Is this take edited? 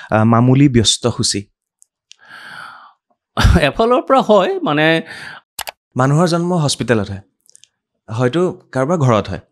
yes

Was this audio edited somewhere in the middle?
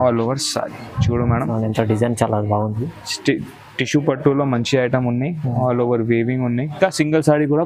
yes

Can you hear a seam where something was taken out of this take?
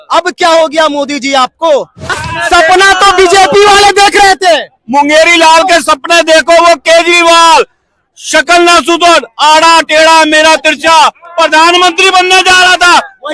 yes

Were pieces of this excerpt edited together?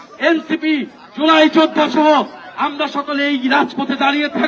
no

